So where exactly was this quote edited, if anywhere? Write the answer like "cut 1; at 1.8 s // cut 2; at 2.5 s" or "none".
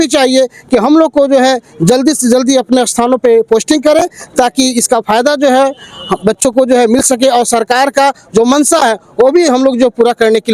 none